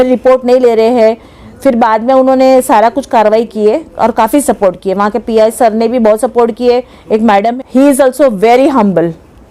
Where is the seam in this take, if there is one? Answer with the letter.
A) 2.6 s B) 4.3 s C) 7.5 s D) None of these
C